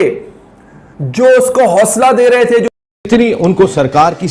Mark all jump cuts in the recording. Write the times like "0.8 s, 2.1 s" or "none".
3.1 s